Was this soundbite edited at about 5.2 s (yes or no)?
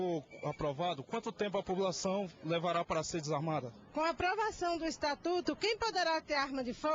no